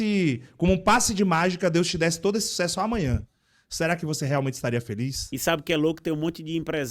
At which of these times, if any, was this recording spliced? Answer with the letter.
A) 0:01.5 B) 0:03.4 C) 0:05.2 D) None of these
C